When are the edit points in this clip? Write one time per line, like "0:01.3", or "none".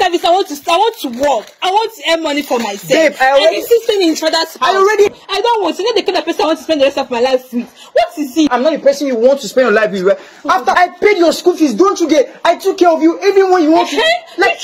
0:05.1
0:08.5
0:10.7

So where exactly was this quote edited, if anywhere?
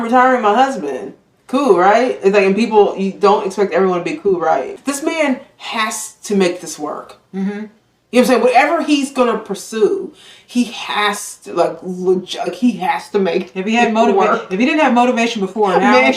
0:04.7

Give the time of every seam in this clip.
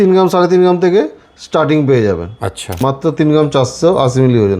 0:02.8

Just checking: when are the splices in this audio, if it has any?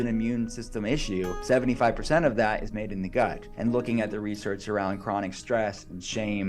0:01.4
0:03.5

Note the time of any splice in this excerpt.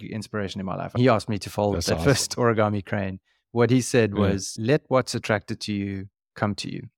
none

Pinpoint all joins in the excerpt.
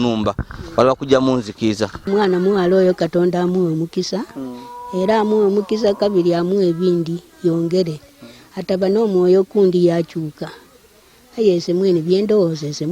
0:02.1

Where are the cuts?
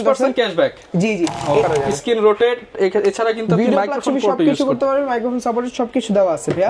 0:01.6

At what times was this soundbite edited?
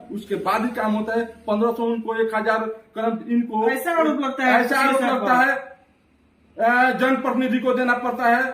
none

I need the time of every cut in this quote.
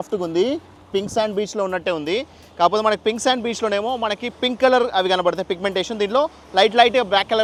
none

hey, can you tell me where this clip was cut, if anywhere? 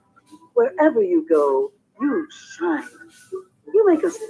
0:01.2

